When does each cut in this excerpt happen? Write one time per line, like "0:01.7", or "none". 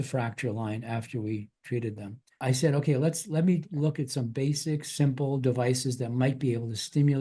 0:02.4